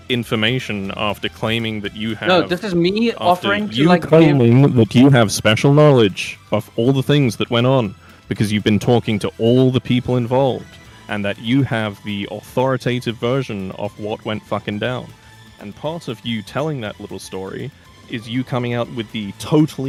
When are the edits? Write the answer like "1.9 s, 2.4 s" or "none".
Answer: none